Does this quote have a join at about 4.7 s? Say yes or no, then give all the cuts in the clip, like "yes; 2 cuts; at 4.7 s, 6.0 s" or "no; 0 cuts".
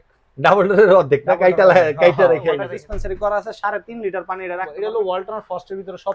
yes; 2 cuts; at 2.6 s, 4.7 s